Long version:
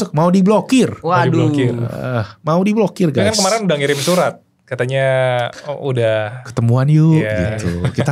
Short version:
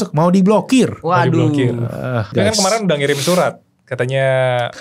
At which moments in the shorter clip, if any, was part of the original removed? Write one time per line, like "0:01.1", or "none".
0:02.3